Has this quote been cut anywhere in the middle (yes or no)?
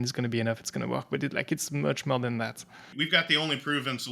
yes